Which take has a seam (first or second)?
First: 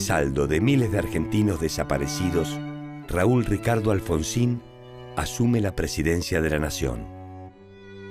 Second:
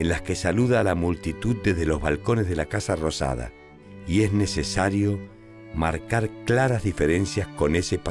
second